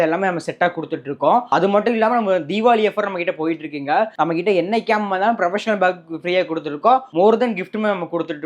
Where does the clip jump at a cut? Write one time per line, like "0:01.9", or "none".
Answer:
none

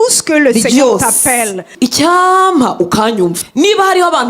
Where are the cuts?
0:01.7
0:03.4

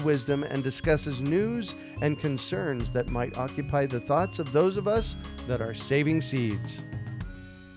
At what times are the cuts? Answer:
0:06.6

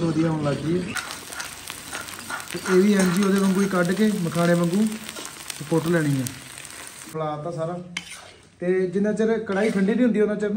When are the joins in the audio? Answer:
0:01.0
0:07.1

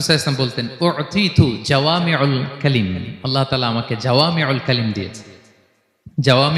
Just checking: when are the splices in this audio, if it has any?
none

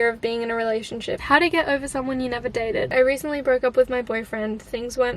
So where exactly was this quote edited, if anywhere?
0:01.2
0:02.9

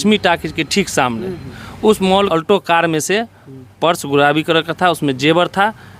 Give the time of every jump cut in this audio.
0:02.3

